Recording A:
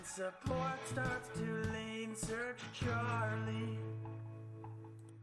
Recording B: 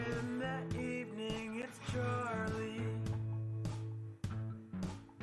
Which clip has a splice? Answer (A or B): B